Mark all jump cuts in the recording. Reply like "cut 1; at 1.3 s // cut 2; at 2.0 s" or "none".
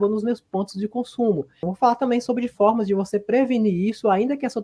cut 1; at 1.6 s